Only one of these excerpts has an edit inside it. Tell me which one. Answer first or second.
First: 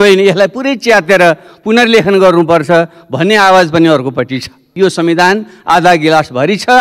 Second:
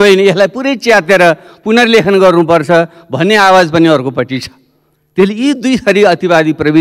first